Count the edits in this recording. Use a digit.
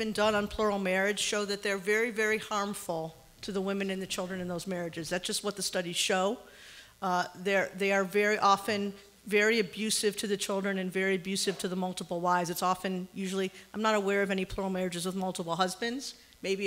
1